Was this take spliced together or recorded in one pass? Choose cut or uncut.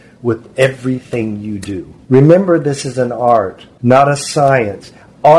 cut